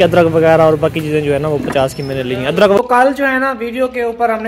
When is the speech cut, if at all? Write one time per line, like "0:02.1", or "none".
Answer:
0:02.8